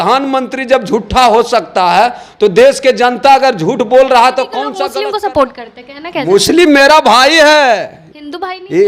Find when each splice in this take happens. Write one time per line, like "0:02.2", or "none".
0:04.8